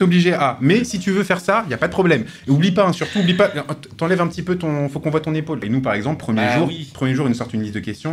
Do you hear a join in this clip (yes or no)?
yes